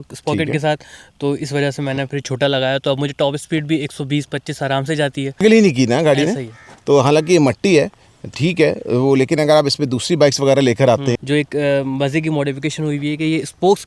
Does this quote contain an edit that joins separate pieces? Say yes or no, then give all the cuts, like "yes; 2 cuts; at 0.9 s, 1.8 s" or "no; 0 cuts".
yes; 2 cuts; at 5.4 s, 11.2 s